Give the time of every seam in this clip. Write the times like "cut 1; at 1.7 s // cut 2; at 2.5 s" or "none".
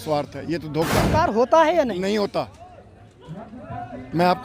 cut 1; at 1.1 s